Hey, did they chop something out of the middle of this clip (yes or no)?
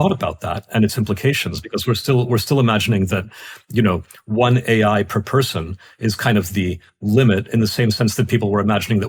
no